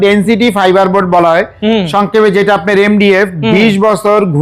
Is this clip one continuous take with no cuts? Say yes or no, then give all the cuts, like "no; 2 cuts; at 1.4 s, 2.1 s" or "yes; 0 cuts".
yes; 0 cuts